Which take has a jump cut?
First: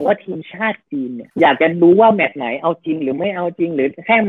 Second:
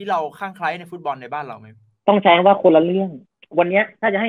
second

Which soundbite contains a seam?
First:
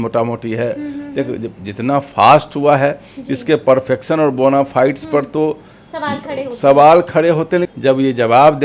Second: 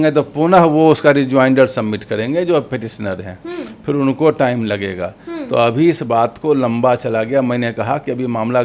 first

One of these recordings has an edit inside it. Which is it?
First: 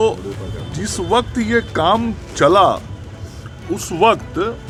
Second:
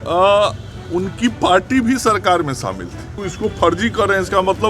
second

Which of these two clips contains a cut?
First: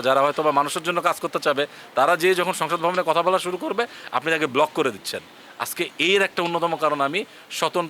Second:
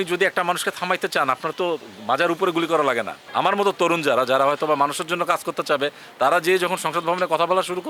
second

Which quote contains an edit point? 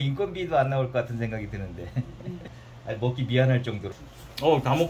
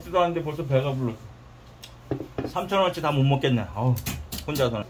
first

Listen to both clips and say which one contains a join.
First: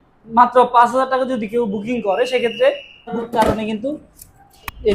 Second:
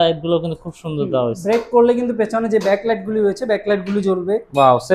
first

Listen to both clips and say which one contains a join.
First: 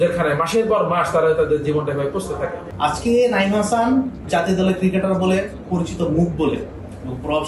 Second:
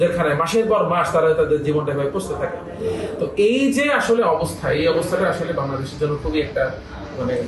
first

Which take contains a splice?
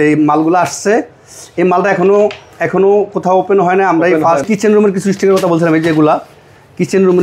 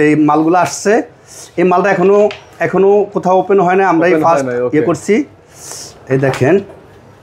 first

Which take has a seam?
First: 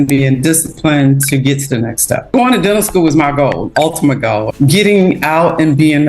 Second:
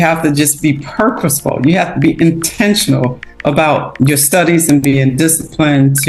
first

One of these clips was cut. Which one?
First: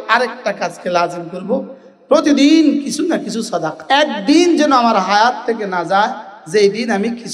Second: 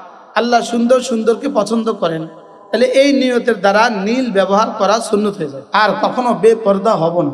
second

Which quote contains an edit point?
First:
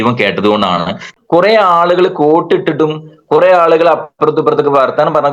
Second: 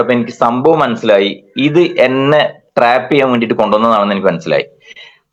first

